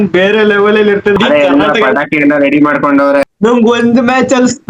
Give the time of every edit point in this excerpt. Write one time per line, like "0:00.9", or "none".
0:01.2
0:03.3